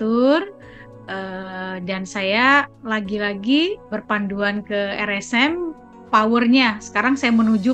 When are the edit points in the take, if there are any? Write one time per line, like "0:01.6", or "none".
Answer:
0:02.8
0:03.8